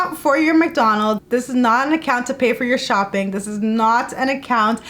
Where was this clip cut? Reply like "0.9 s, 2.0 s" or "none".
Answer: 1.2 s